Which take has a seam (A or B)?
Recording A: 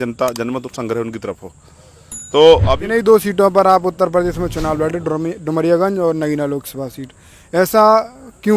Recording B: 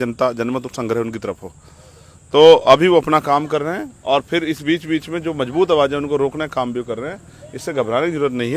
A